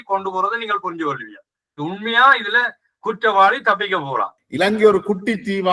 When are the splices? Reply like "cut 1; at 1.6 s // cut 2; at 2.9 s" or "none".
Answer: cut 1; at 4.4 s